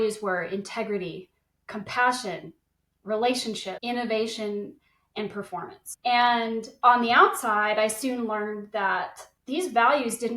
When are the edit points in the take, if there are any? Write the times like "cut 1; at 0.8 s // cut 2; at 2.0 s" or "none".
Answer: cut 1; at 3.7 s // cut 2; at 5.8 s // cut 3; at 9.3 s